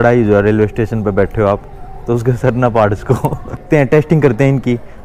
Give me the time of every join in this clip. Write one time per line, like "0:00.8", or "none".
0:03.6

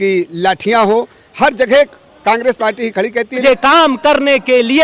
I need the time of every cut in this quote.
0:03.4

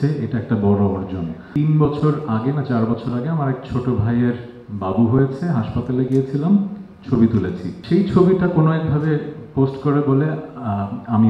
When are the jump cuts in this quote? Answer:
0:01.5
0:07.8

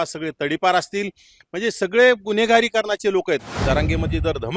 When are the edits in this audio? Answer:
0:03.5

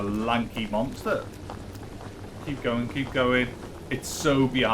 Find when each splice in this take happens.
0:01.8

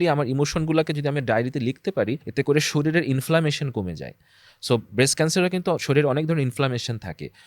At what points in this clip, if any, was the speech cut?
0:02.2

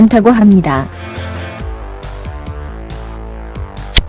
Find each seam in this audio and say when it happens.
0:00.9
0:02.0

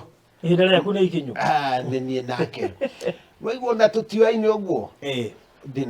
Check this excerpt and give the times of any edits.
0:03.3

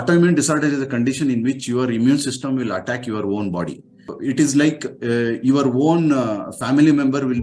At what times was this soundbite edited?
0:04.1

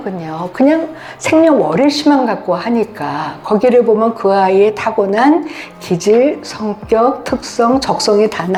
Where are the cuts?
none

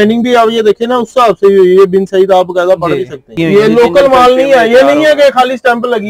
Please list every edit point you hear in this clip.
0:03.3

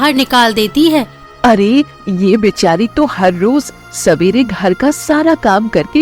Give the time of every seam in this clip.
0:01.2

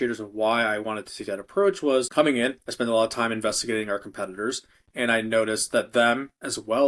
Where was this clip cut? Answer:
0:02.1

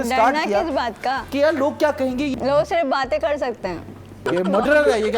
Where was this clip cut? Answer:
0:01.2
0:02.3
0:04.2

